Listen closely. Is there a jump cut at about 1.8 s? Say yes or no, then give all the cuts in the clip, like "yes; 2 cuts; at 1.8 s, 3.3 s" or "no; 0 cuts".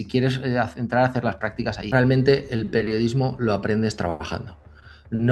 yes; 1 cut; at 1.8 s